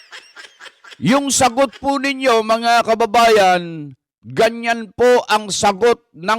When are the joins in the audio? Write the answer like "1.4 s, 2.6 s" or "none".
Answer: 0.9 s